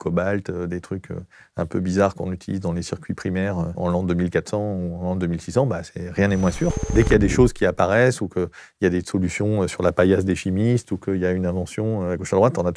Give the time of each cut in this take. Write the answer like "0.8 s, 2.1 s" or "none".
3.8 s, 6.8 s